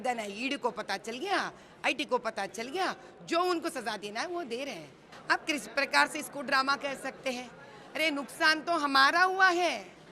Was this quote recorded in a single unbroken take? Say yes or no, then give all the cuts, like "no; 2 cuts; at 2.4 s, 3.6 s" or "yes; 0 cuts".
no; 1 cut; at 5.1 s